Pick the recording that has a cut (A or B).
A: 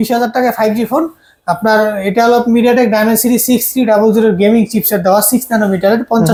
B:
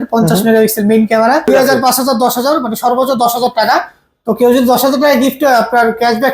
B